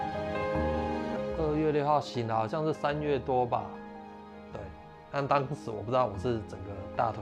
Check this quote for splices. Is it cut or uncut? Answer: cut